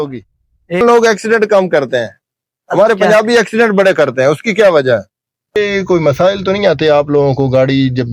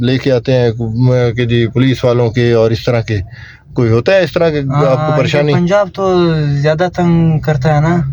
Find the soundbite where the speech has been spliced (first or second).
first